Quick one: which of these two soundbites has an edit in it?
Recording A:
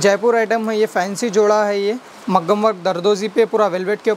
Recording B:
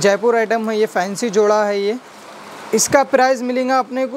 A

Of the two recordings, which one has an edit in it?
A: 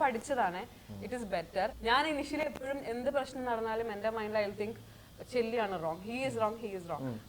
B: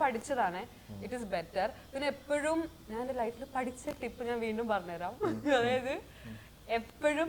A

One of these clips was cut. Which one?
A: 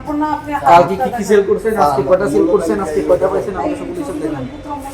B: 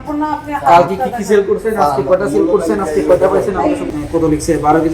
B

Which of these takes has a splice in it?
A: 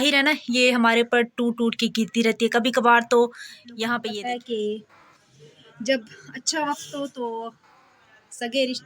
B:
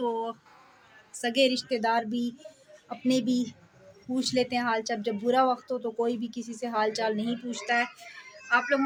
A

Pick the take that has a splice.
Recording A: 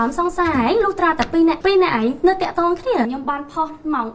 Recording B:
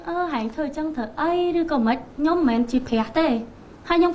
A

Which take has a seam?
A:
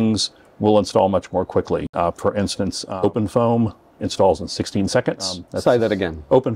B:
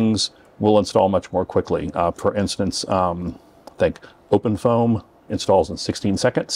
A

